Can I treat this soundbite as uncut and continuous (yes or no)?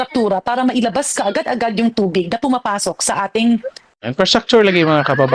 yes